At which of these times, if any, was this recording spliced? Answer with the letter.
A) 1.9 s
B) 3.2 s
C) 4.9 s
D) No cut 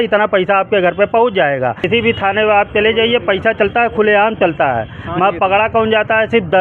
A